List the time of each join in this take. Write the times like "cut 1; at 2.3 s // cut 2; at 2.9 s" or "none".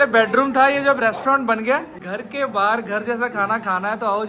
cut 1; at 2.0 s